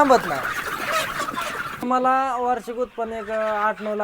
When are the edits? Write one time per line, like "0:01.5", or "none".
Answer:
0:01.8